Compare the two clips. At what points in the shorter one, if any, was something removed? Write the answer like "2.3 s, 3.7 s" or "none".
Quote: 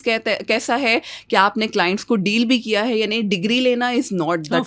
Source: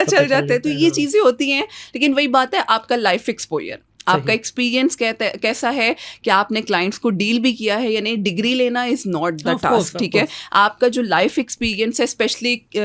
none